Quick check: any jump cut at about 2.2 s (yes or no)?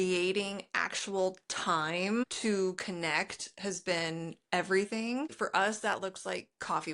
yes